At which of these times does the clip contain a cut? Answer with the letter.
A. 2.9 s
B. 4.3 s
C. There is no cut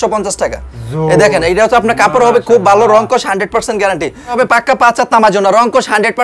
B